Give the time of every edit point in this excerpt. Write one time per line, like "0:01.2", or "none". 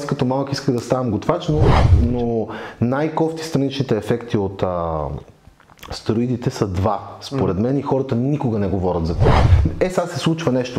0:01.9
0:09.5